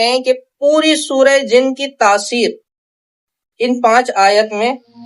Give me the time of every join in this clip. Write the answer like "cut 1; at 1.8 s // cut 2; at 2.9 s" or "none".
none